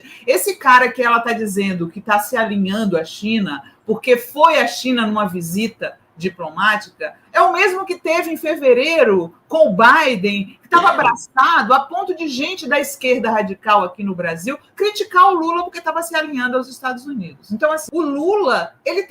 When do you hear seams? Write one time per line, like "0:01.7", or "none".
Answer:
0:17.9

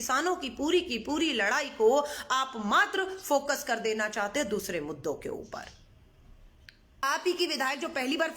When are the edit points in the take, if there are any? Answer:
0:07.0

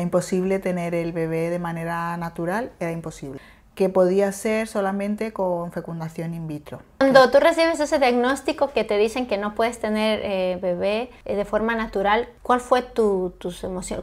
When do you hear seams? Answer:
0:03.3
0:07.0
0:11.1
0:12.3

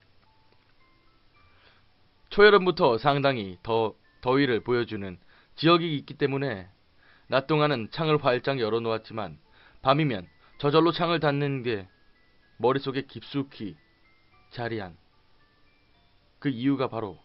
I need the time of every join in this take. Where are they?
0:12.2

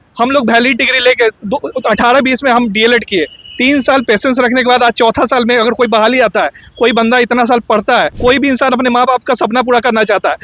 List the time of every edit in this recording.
0:01.4
0:08.2

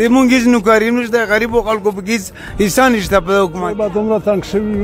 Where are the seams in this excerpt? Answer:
0:03.8

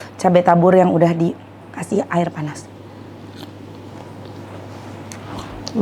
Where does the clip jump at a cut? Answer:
none

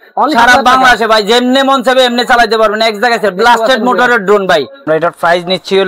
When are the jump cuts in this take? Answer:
0:04.8

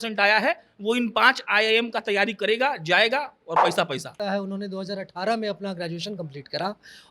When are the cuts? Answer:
0:04.1

